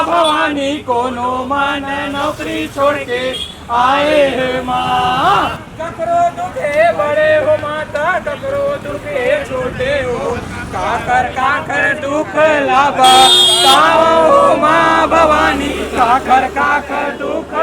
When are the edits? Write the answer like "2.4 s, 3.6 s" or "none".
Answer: 5.7 s